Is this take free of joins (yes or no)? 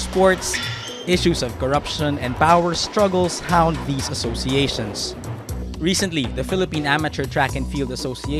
no